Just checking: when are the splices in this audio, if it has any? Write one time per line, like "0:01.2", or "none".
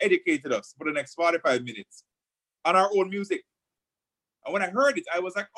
none